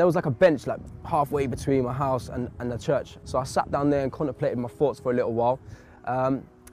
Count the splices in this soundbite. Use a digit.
1